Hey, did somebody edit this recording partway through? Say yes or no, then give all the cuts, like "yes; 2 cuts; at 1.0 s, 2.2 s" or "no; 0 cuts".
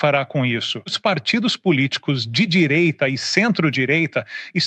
yes; 1 cut; at 1.0 s